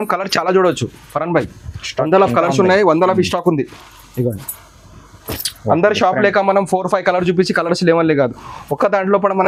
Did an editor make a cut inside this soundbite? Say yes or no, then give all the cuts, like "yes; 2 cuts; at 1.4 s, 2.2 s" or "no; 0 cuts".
no; 0 cuts